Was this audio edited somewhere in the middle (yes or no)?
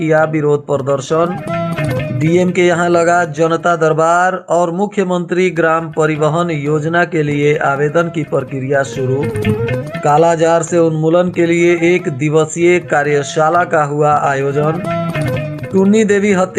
no